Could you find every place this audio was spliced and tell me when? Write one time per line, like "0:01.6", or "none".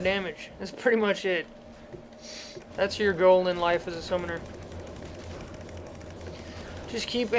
0:00.9